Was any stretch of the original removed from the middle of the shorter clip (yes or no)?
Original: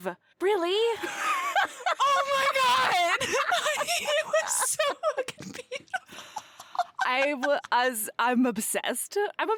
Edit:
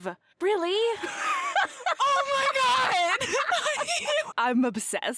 yes